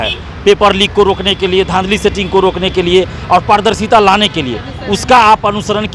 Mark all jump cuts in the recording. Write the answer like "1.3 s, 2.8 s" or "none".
none